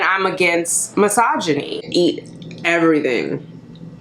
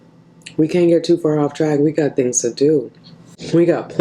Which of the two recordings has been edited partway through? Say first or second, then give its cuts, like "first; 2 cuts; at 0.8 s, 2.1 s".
first; 1 cut; at 1.9 s